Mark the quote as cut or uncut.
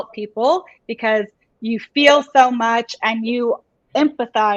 uncut